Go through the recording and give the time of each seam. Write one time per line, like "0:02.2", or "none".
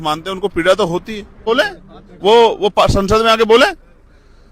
0:01.4